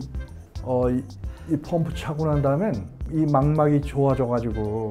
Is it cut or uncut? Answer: cut